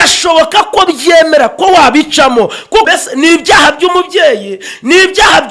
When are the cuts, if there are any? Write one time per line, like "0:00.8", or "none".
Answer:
0:02.9